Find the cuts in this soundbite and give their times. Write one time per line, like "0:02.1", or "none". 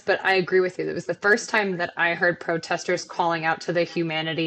none